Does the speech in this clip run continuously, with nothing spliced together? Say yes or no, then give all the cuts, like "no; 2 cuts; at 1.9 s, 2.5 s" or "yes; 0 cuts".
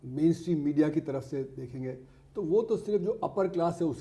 yes; 0 cuts